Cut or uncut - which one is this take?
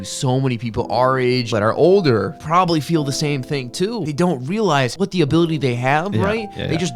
cut